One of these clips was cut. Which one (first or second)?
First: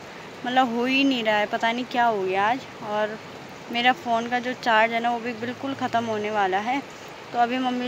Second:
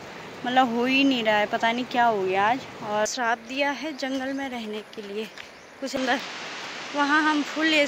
second